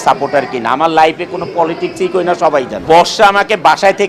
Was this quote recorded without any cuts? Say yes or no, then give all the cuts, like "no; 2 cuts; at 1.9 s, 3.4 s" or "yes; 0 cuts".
no; 1 cut; at 2.8 s